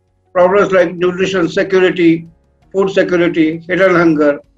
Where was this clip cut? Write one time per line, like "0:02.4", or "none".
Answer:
none

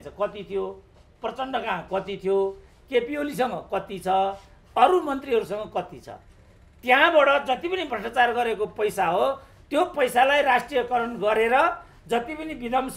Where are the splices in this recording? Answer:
none

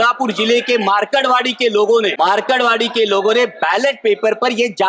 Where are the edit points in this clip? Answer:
0:02.2

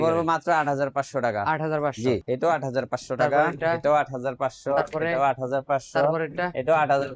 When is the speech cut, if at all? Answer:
0:02.2

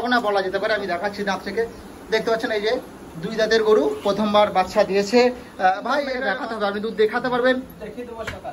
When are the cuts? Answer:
0:06.2

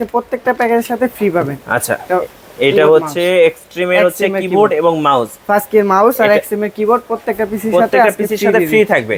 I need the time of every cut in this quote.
none

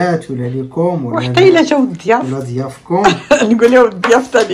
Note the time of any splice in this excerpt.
none

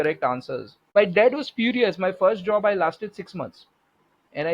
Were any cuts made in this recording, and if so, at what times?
0:00.9

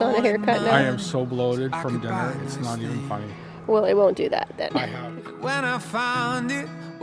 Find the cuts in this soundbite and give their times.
0:05.2

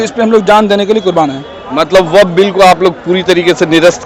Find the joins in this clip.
none

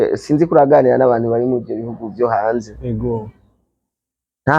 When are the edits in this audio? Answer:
none

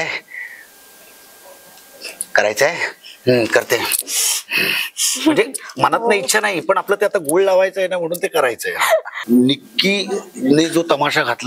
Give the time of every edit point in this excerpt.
0:09.1

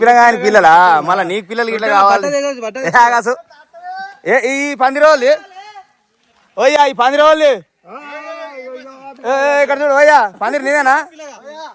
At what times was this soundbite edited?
none

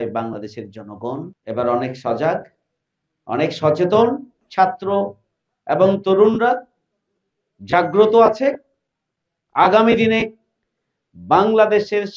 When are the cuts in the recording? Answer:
0:01.3
0:04.4

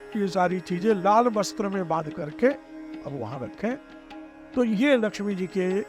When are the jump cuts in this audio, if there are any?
0:04.5

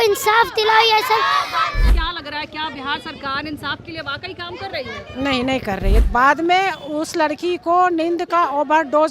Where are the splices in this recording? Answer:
0:01.8
0:06.0

